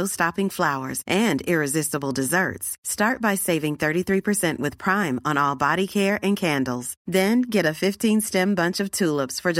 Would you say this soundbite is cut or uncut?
uncut